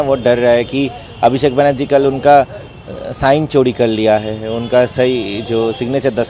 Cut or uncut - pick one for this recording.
uncut